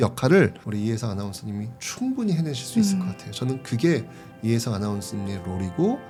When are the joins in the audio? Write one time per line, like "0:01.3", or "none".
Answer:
none

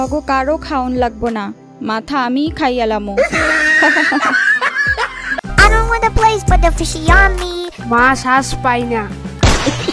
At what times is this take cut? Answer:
0:05.2

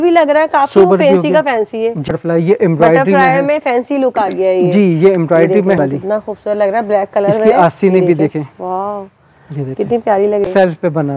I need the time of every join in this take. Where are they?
0:02.1
0:05.8
0:10.5

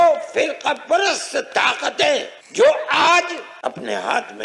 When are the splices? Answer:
0:02.4
0:03.5

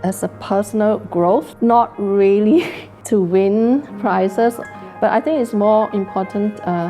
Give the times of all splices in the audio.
0:01.5
0:04.7

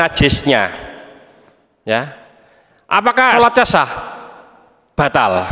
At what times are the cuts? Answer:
0:03.4

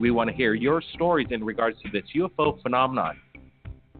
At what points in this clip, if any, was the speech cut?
0:01.7

